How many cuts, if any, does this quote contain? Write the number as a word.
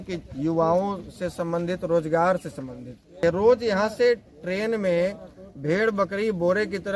one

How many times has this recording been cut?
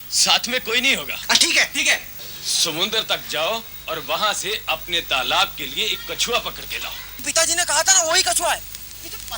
two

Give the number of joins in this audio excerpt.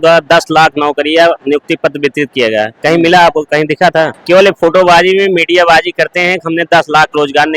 one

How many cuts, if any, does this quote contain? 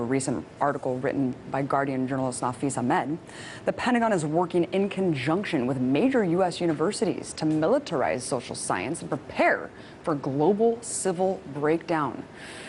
zero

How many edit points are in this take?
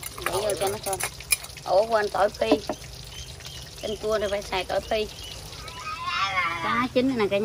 one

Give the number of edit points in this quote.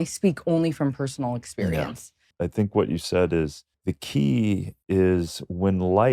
three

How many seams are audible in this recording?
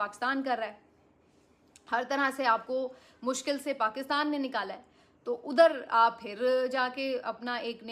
zero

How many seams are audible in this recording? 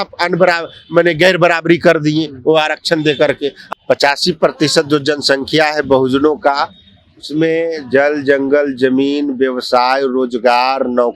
one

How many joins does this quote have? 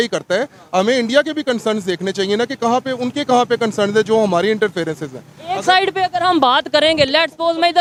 zero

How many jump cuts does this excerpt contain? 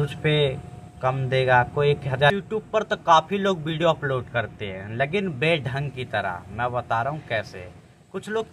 one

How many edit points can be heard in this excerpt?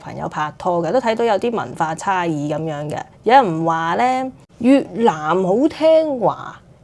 zero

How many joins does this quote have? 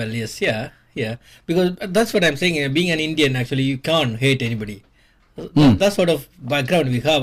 zero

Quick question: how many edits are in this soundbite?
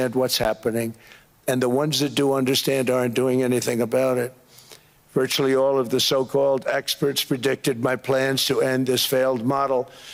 zero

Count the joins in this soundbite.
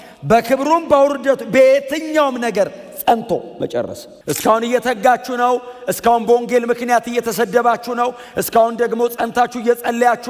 one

